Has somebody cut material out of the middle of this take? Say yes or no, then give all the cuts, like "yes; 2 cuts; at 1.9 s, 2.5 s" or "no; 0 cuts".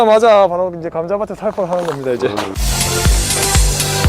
yes; 1 cut; at 2.6 s